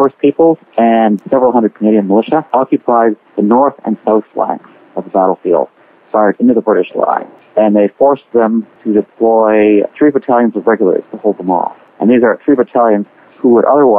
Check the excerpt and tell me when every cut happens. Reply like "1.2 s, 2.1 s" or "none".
7.3 s, 8.7 s